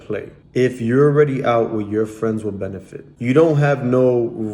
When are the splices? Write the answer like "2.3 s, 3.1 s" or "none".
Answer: 3.1 s